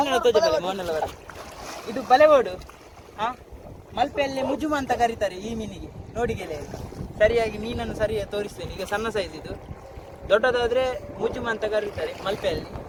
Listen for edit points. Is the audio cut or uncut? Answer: uncut